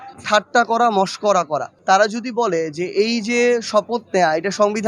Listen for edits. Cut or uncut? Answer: cut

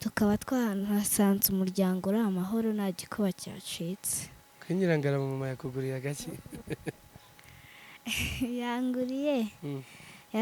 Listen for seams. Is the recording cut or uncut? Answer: uncut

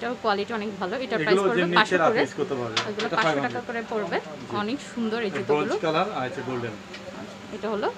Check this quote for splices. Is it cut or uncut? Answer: uncut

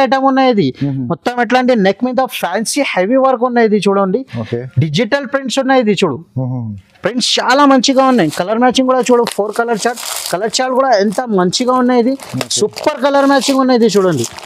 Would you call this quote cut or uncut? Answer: uncut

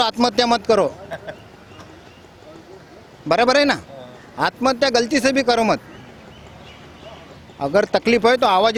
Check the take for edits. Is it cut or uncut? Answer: uncut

